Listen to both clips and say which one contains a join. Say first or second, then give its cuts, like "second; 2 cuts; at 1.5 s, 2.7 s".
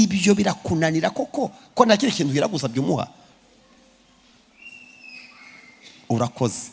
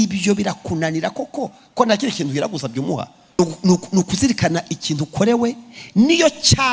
second; 1 cut; at 3.4 s